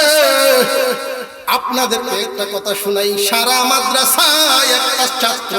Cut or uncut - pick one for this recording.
cut